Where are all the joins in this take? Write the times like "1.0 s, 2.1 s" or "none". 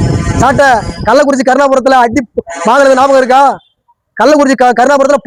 none